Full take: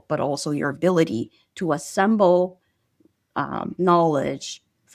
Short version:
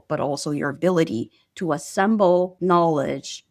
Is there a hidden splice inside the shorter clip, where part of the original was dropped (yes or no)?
yes